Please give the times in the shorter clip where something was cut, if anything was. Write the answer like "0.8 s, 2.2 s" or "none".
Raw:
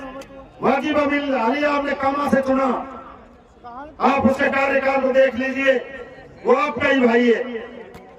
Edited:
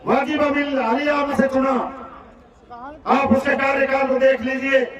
1.3 s